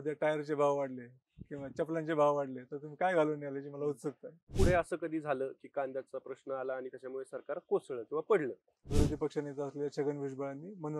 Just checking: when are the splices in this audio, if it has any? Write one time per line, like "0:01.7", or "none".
0:04.5
0:08.7